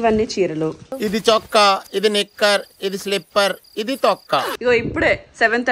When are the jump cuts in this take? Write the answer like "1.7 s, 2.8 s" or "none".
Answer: 0.8 s, 4.5 s